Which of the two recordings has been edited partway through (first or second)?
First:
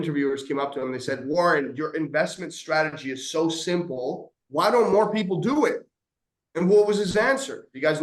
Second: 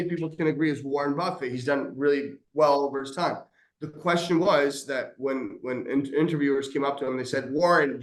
first